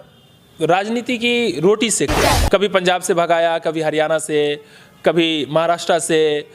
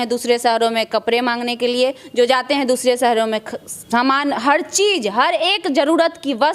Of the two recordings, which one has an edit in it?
first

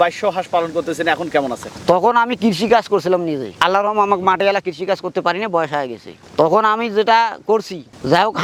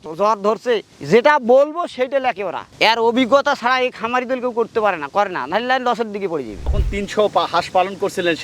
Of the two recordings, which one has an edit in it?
second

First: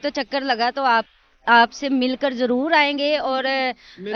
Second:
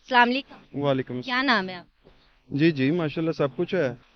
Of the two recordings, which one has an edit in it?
second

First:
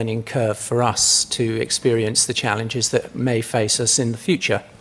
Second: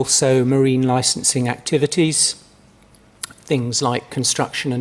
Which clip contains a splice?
first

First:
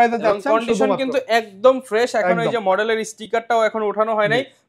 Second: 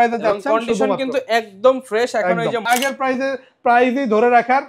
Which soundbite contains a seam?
second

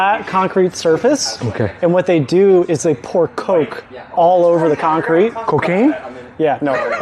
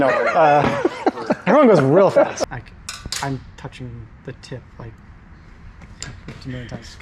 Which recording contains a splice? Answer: second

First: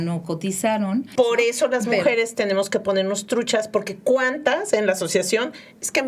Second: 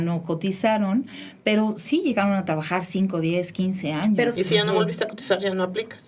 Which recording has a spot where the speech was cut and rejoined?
first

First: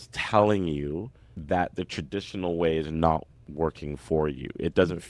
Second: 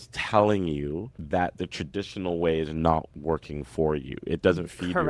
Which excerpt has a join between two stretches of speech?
second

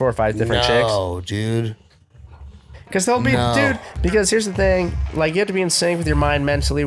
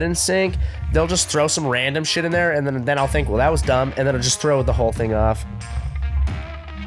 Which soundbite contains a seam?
first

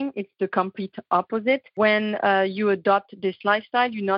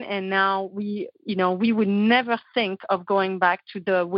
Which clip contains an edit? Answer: first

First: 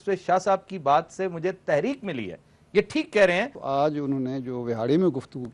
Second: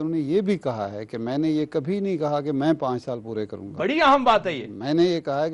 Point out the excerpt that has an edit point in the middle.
first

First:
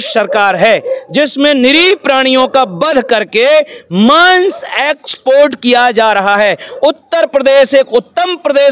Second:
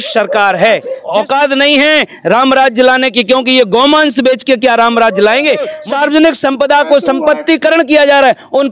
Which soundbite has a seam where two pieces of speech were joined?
second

